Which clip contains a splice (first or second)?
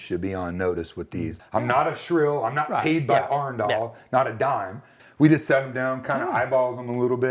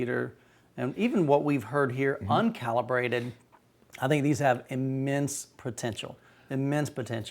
first